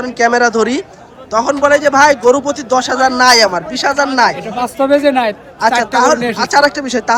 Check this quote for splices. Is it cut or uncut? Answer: uncut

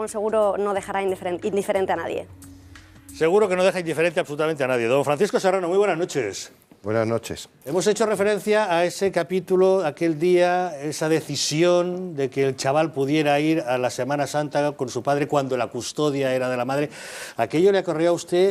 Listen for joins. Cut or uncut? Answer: uncut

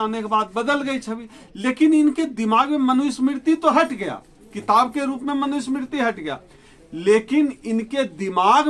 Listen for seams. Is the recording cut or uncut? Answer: uncut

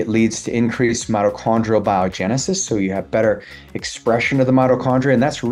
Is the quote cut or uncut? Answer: uncut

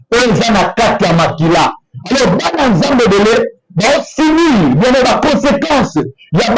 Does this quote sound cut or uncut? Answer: uncut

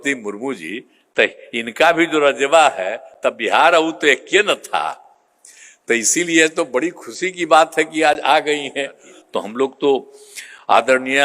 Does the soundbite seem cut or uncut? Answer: cut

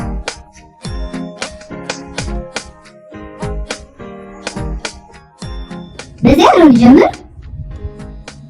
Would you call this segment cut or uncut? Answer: cut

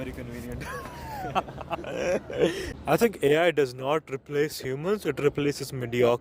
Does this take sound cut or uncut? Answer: cut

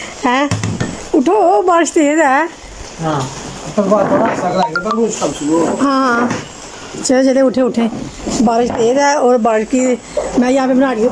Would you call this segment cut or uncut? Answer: uncut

